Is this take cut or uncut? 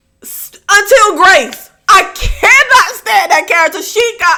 uncut